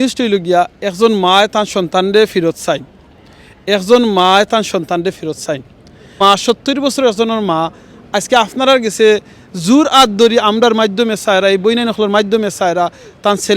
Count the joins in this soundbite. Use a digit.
1